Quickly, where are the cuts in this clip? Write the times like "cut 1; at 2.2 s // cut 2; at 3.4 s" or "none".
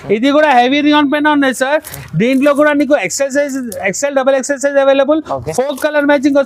none